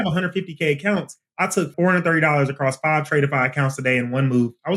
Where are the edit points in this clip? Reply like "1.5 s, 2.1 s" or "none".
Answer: 1.7 s